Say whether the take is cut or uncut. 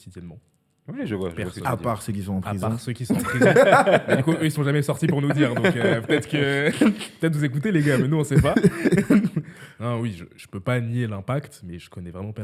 uncut